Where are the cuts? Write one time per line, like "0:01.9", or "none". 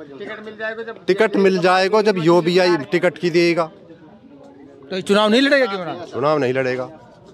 none